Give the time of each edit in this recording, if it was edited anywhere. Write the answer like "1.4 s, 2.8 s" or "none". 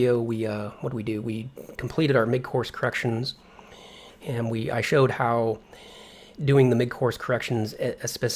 6.8 s